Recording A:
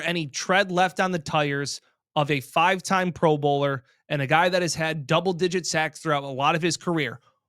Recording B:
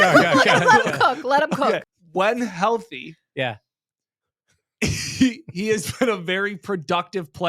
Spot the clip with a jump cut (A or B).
B